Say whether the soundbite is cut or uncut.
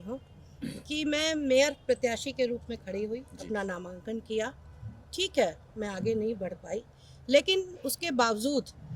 uncut